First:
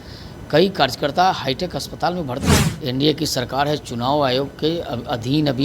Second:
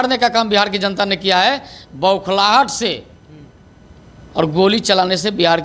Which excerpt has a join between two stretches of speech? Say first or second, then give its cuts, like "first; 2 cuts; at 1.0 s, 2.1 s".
first; 1 cut; at 2.7 s